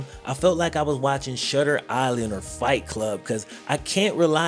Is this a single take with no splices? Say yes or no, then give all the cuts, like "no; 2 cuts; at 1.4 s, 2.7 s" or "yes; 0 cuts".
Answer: yes; 0 cuts